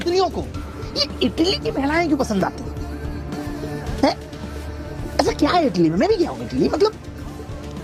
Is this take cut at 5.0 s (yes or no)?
no